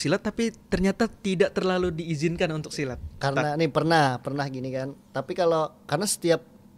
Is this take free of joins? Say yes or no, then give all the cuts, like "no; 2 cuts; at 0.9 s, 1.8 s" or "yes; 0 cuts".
yes; 0 cuts